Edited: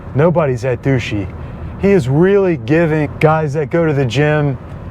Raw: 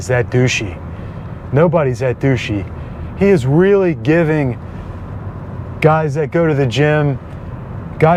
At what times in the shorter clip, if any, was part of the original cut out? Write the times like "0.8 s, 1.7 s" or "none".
3.1 s